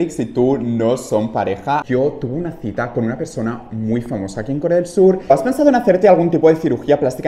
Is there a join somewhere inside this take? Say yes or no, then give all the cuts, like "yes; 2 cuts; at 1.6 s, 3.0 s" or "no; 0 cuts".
yes; 2 cuts; at 1.8 s, 5.3 s